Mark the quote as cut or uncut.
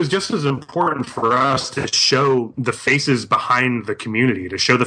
uncut